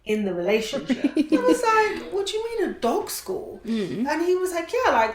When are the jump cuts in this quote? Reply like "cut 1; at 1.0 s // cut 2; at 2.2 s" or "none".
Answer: cut 1; at 0.9 s